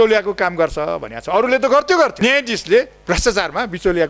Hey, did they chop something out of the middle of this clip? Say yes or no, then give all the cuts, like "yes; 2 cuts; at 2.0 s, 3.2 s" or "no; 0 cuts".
yes; 2 cuts; at 2.1 s, 3.0 s